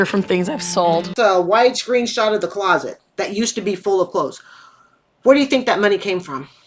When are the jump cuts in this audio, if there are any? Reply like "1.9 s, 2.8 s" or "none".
1.1 s